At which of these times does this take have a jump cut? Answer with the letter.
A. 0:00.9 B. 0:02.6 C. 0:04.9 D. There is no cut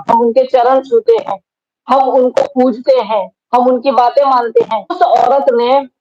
C